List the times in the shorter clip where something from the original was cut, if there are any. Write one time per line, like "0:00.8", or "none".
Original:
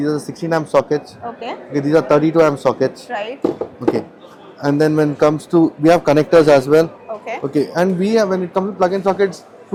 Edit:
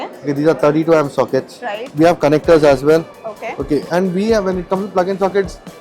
0:01.9